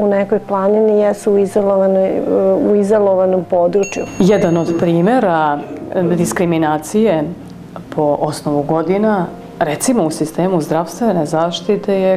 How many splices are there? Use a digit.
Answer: 1